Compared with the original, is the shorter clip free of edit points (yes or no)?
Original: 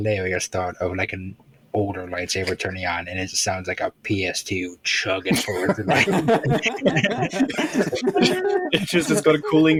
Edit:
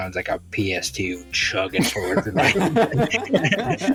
yes